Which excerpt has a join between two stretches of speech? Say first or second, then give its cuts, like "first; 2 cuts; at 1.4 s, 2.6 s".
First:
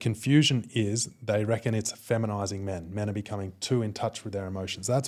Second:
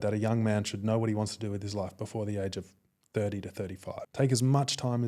second; 1 cut; at 4.0 s